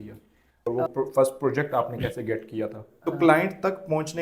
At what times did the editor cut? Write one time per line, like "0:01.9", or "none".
0:00.7
0:02.9